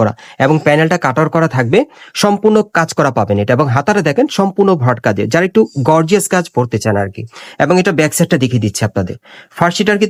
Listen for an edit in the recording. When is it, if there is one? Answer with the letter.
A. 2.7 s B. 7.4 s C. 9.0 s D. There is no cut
D